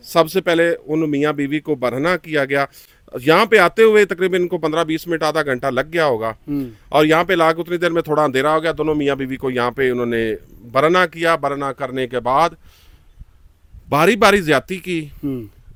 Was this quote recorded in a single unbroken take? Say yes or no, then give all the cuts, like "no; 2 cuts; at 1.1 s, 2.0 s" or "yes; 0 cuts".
yes; 0 cuts